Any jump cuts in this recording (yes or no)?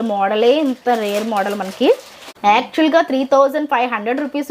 yes